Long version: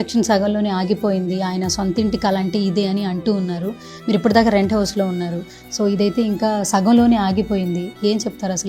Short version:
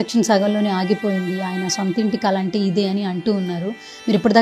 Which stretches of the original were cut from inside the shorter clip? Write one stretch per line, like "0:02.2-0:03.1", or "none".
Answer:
none